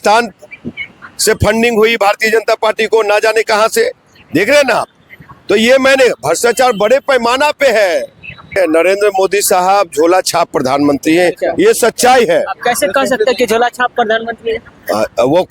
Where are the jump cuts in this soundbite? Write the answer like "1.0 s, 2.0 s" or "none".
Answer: 8.6 s